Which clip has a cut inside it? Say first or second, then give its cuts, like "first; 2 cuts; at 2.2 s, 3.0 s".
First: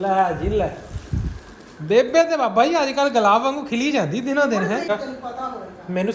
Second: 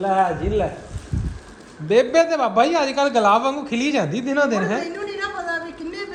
first; 1 cut; at 4.9 s